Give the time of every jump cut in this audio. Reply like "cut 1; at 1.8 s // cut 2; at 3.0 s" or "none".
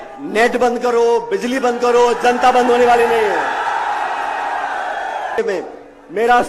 cut 1; at 5.4 s